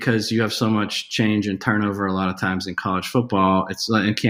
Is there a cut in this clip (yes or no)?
no